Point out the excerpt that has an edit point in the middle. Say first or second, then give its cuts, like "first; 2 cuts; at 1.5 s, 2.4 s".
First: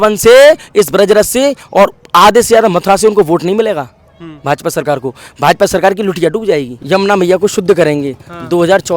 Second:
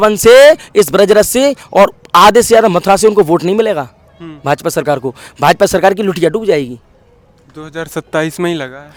first; 1 cut; at 6.7 s